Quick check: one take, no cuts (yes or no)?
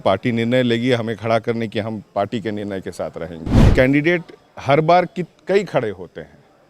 no